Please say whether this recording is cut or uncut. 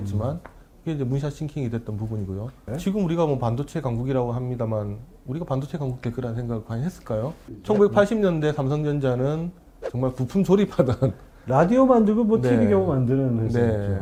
uncut